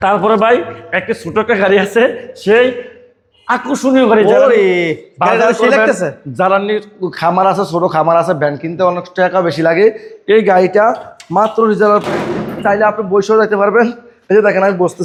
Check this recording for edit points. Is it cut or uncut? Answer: uncut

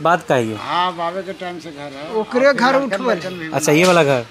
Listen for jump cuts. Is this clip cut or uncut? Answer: uncut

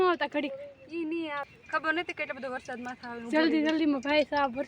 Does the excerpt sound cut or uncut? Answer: cut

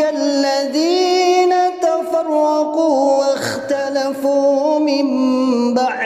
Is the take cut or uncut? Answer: uncut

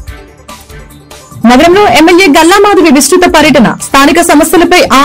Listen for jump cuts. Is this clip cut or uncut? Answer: cut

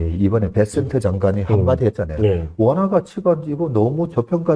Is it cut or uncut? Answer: uncut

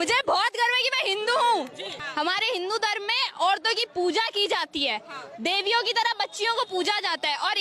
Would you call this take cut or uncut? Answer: cut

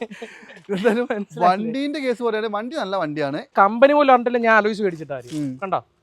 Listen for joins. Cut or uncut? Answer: cut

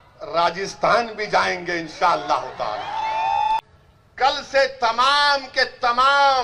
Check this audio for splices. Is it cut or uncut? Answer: cut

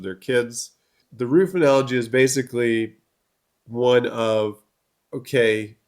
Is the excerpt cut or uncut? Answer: cut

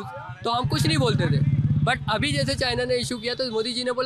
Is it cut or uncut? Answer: uncut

